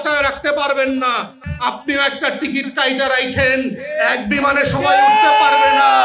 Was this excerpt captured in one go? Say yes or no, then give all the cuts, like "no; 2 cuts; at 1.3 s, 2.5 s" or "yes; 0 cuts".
no; 1 cut; at 1.5 s